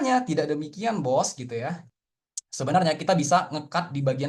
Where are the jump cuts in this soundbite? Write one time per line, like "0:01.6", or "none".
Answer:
0:01.9

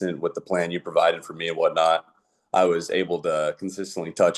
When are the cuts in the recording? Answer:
none

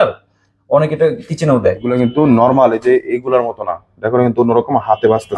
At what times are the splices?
0:01.9

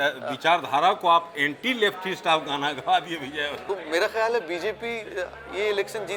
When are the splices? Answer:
0:03.6

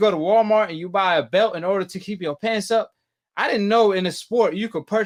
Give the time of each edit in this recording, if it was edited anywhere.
none

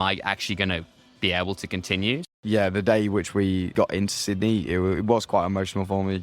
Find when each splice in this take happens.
0:02.2

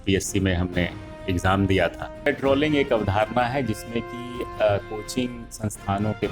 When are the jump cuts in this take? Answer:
0:02.2

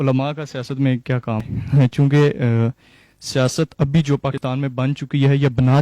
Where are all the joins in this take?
0:01.4
0:04.4

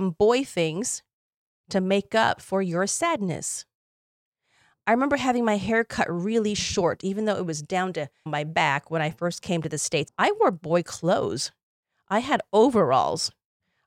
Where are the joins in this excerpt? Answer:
none

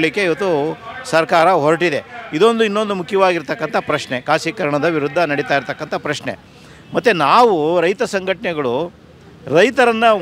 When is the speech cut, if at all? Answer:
none

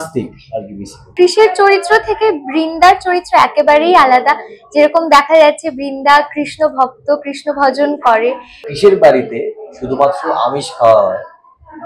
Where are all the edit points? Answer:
0:01.1
0:08.6

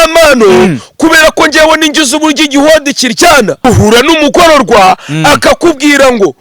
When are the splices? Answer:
0:03.6

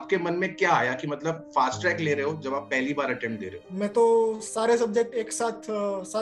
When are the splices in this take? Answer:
0:03.7

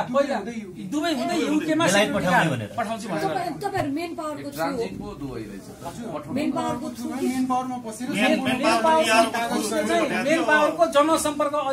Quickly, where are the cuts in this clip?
none

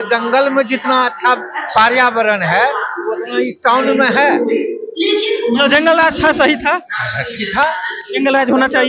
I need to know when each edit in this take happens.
none

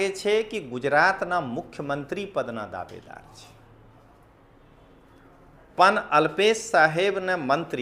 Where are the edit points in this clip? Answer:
none

